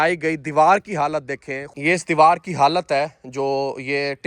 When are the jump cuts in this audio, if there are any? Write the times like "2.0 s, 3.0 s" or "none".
1.7 s